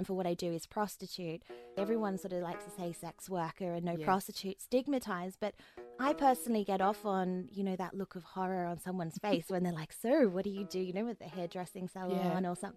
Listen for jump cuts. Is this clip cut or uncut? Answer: cut